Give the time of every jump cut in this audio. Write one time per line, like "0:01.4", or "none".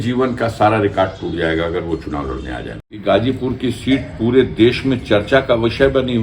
0:02.9